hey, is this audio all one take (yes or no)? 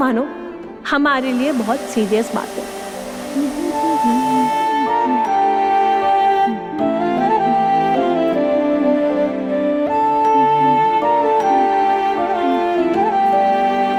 yes